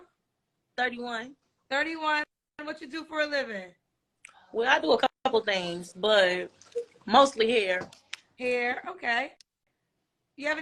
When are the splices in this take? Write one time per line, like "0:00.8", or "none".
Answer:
none